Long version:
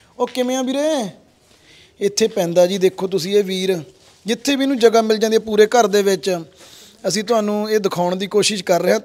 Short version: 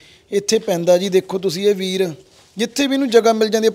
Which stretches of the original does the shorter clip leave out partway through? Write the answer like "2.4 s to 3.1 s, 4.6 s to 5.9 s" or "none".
none